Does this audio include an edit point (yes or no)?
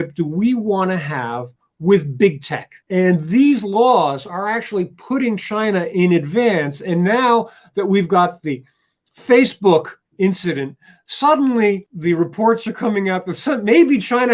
no